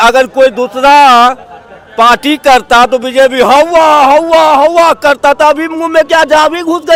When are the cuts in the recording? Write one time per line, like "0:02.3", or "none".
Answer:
none